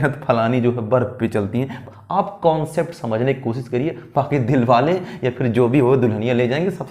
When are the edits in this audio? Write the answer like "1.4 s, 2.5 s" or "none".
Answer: 1.8 s